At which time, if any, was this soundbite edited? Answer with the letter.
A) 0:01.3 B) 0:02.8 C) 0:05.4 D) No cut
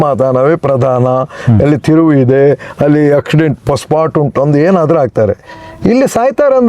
D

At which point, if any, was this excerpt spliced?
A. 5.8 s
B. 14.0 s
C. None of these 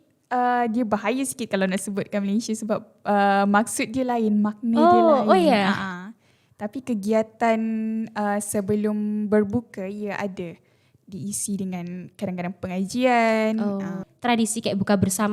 B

